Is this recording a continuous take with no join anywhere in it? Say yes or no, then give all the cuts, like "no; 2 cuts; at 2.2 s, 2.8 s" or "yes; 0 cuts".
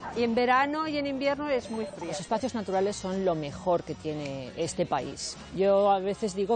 no; 2 cuts; at 2.1 s, 5.2 s